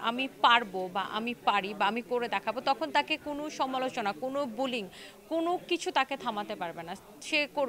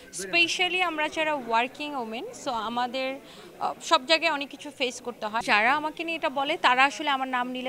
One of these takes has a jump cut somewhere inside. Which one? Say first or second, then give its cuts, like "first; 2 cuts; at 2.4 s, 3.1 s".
second; 1 cut; at 5.4 s